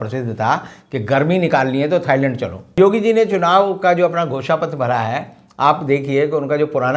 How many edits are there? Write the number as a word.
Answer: one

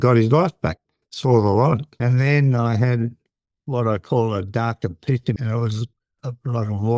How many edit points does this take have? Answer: two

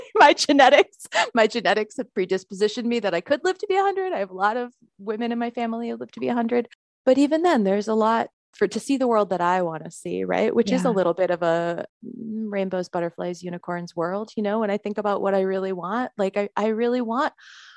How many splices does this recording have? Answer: three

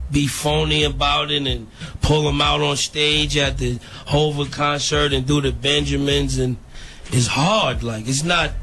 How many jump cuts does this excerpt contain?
one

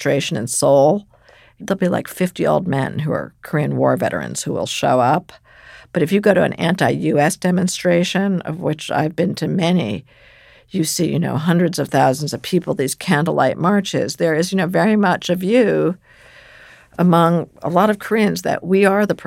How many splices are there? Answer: one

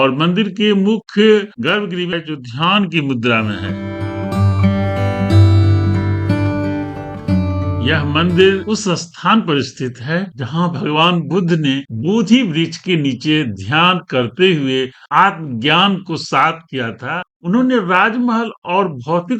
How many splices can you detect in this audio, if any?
two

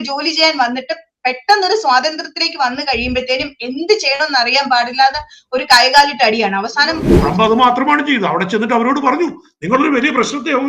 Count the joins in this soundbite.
one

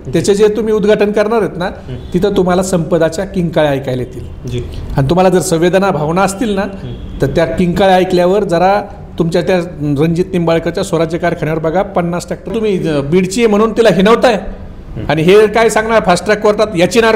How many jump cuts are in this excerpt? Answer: one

